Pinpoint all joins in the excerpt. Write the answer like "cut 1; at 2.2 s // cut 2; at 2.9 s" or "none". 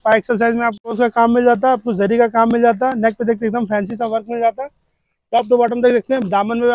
cut 1; at 0.9 s